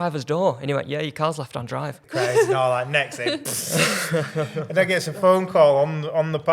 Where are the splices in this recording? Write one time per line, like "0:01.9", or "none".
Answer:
0:02.0

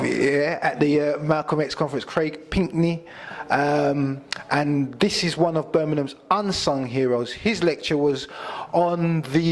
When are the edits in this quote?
0:06.2

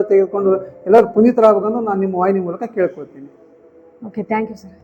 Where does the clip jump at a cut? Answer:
none

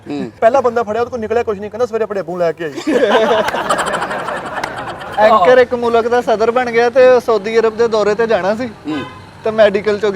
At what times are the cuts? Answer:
none

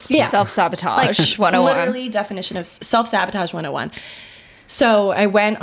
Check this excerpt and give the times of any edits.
none

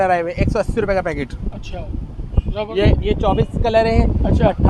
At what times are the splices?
0:02.7

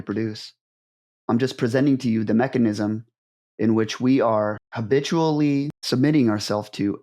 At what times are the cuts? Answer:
0:01.1
0:04.7
0:05.8

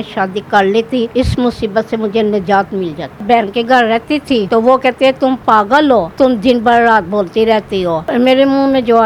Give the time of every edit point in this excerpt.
0:01.1
0:03.2
0:04.5
0:06.1
0:08.1

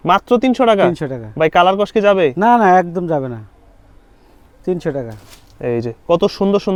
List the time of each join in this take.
none

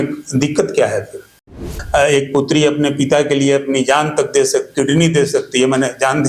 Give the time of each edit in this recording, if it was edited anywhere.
0:01.7

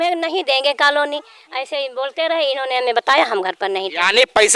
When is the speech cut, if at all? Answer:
none

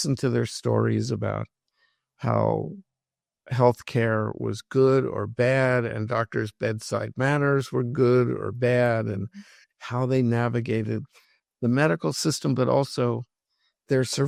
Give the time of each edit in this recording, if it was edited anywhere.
none

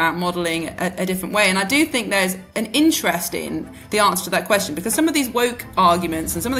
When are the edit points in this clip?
0:02.4

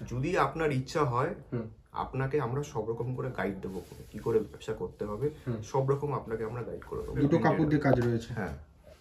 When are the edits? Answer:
0:07.2

